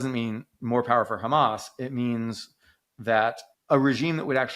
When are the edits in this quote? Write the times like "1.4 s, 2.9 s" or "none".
3.5 s